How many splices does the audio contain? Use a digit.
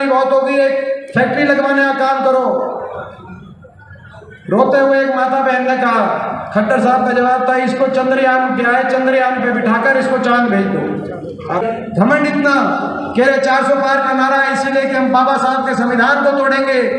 1